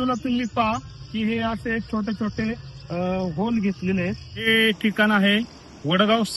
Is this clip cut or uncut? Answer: cut